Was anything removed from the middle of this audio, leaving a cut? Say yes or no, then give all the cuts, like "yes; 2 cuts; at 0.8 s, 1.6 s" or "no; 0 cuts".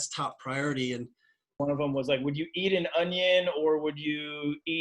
yes; 1 cut; at 1.5 s